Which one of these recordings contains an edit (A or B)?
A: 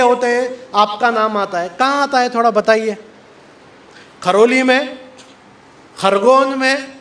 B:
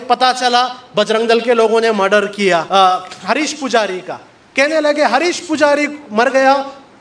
B